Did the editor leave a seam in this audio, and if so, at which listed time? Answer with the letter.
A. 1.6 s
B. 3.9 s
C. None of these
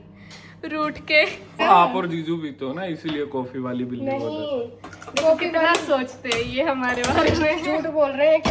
A